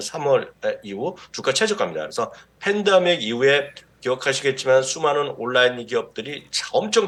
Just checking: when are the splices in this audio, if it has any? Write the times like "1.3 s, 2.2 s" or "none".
none